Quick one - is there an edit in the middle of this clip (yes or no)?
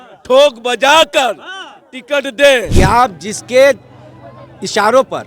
yes